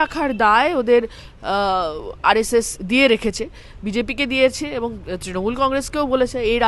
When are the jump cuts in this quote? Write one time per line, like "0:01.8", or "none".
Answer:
none